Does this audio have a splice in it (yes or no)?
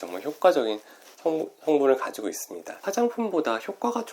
yes